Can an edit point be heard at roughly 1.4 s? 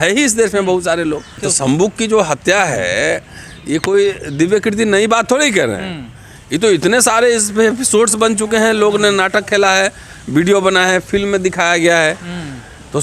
yes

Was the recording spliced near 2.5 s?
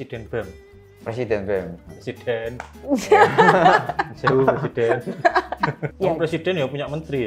no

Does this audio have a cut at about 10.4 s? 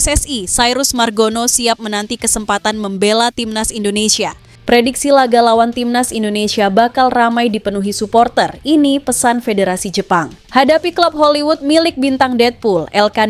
yes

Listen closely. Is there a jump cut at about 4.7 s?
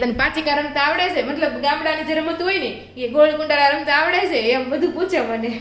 no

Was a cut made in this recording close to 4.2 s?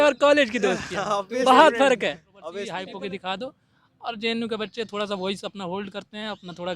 no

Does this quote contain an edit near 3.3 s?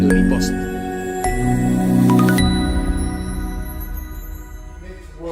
yes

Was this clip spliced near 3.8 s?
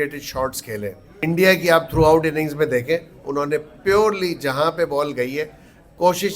no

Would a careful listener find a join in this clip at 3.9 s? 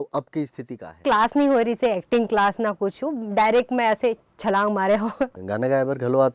no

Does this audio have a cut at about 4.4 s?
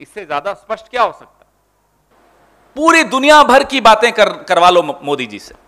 no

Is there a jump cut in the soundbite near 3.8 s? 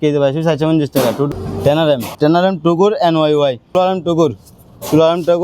yes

